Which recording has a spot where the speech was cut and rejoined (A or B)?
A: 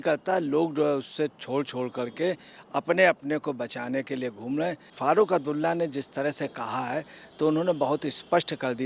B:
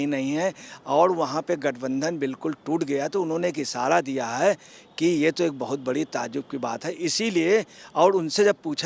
A